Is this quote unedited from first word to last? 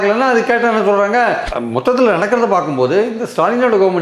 no; 1 cut; at 1.5 s

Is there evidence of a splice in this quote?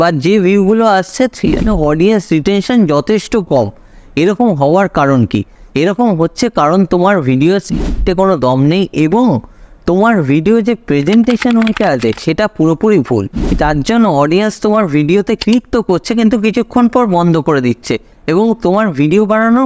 yes; 2 cuts; at 5.6 s, 13.3 s

